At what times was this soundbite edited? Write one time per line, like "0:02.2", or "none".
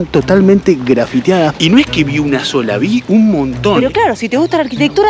0:01.5
0:03.8